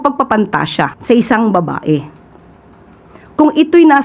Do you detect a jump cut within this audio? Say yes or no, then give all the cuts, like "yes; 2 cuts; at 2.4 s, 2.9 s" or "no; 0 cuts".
yes; 1 cut; at 1.0 s